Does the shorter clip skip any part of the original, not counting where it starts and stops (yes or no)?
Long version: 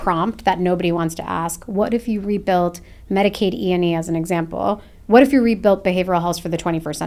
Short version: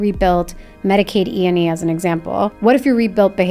yes